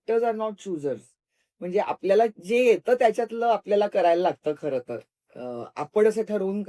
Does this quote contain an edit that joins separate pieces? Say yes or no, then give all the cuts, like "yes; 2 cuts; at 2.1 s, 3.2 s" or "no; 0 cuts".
no; 0 cuts